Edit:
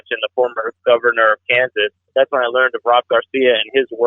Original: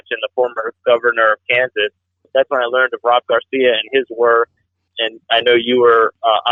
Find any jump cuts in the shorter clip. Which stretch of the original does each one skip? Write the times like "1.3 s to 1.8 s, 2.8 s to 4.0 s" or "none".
2.0 s to 2.2 s